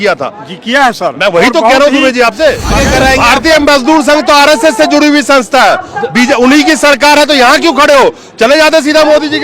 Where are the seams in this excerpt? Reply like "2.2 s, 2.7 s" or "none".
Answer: 2.7 s